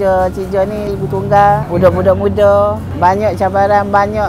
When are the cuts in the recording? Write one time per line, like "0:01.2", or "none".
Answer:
0:02.9